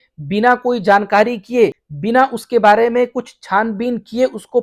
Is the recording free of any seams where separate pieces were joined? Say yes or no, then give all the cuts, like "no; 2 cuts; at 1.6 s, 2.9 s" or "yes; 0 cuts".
no; 1 cut; at 1.9 s